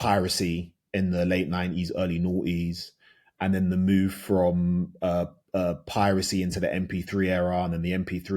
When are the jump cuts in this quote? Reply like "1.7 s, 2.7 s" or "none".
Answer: none